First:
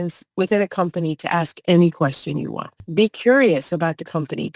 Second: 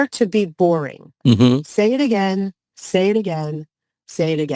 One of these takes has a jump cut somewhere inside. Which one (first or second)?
first